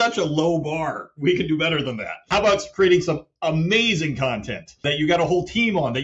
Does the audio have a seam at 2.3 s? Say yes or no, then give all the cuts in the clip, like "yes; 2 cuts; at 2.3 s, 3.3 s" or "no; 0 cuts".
yes; 2 cuts; at 2.3 s, 4.9 s